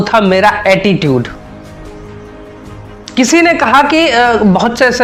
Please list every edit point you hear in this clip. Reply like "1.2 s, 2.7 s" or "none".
none